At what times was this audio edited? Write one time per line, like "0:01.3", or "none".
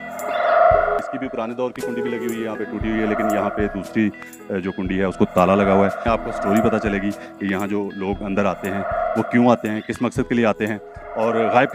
0:01.0
0:06.0